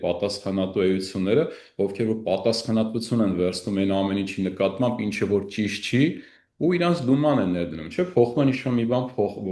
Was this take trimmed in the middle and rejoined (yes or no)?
no